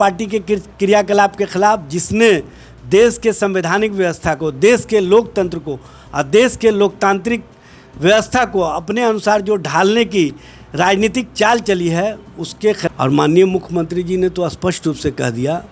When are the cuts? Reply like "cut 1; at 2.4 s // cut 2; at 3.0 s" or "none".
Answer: cut 1; at 12.9 s